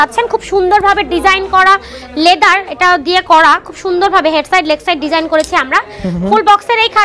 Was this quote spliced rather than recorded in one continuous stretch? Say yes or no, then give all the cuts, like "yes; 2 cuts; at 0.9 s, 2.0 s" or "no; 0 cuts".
no; 0 cuts